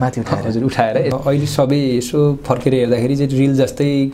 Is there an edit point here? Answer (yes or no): yes